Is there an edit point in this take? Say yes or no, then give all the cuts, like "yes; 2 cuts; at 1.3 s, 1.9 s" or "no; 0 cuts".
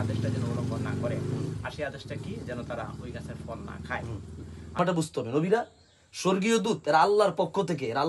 yes; 1 cut; at 4.8 s